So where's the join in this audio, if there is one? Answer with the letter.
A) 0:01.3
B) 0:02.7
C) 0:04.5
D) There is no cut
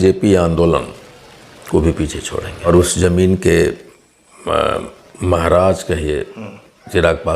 B